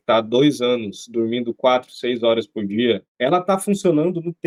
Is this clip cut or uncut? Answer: uncut